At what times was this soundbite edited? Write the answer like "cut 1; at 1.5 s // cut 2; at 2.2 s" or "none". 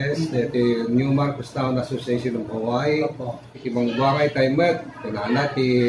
cut 1; at 3.6 s